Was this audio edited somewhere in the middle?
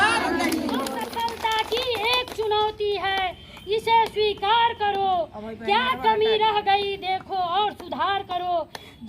yes; 1 cut; at 1.0 s

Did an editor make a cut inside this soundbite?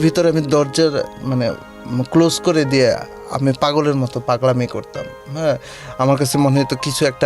no; 0 cuts

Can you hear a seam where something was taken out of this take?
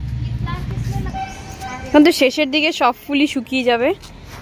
yes; 1 cut; at 1.0 s

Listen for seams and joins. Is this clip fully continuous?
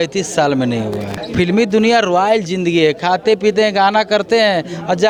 yes; 0 cuts

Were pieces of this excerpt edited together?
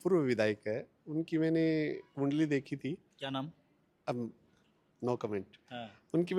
no; 0 cuts

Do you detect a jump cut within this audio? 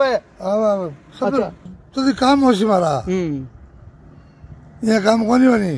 yes; 1 cut; at 1.7 s

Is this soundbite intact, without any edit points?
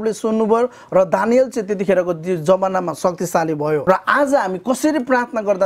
no; 1 cut; at 3.8 s

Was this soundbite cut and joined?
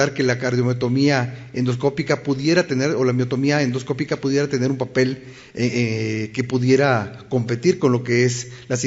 yes; 1 cut; at 1.0 s

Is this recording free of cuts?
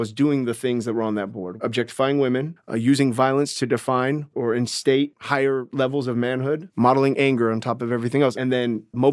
no; 6 cuts; at 1.4 s, 2.6 s, 4.3 s, 5.2 s, 6.7 s, 8.4 s

